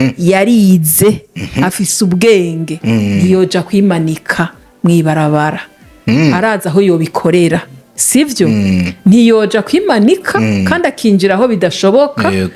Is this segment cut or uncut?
uncut